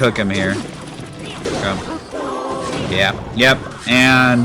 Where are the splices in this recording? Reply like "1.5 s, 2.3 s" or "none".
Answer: 1.5 s